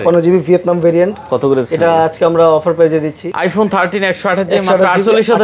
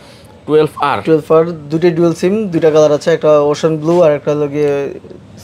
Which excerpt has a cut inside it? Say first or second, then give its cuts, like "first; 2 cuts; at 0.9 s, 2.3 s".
first; 1 cut; at 3.2 s